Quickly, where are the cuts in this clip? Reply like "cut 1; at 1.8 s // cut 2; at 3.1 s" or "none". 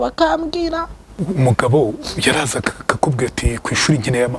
cut 1; at 1.2 s